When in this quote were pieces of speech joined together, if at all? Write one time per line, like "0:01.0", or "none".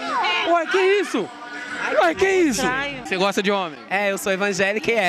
0:03.0